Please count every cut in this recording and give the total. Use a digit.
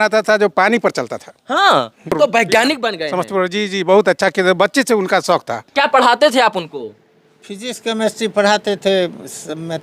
2